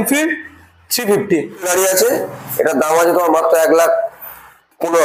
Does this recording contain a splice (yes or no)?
yes